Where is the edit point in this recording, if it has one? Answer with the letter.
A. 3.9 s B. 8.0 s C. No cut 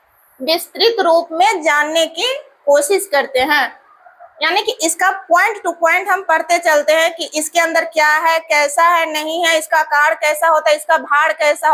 C